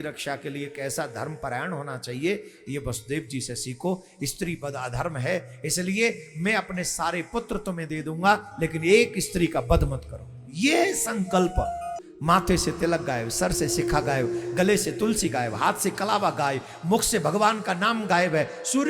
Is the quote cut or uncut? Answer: cut